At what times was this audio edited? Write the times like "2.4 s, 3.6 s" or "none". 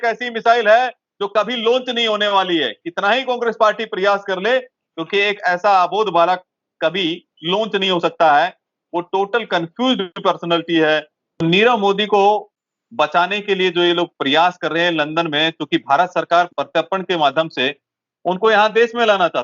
11.4 s